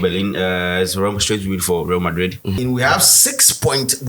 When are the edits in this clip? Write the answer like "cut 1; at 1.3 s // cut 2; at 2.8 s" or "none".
cut 1; at 2.6 s